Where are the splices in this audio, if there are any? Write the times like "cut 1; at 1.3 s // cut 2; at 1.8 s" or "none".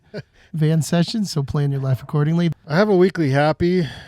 cut 1; at 2.5 s